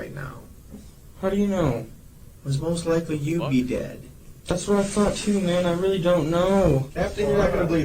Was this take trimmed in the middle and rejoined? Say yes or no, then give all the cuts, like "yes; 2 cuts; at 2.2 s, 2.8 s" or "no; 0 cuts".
yes; 1 cut; at 6.9 s